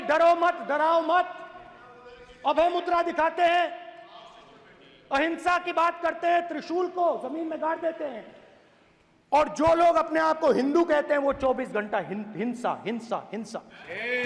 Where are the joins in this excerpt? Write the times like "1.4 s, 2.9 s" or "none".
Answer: none